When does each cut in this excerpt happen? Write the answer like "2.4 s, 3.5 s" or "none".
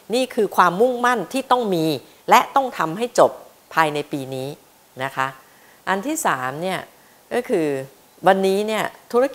none